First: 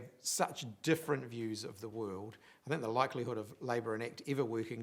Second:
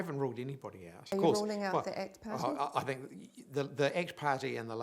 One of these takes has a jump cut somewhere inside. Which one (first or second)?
second